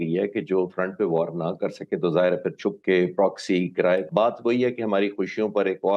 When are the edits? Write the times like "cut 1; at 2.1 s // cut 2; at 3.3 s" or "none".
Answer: cut 1; at 4.1 s